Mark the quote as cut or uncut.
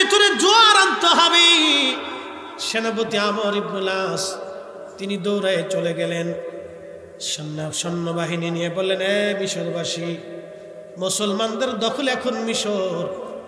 uncut